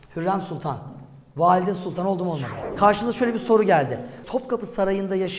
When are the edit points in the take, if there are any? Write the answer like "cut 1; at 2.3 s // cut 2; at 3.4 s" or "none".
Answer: cut 1; at 2.6 s // cut 2; at 4.2 s